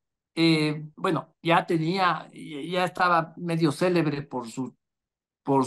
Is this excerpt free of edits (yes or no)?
yes